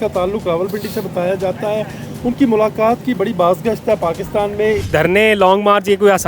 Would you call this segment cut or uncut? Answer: cut